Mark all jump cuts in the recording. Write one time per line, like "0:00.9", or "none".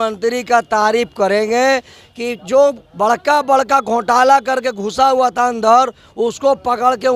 none